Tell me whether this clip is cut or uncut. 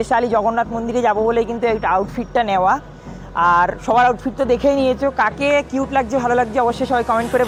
uncut